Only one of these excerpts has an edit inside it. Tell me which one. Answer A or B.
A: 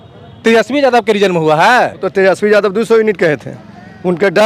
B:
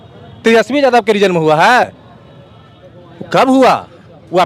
A